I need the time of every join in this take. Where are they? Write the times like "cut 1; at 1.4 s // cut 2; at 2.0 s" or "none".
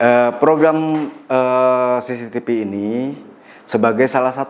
none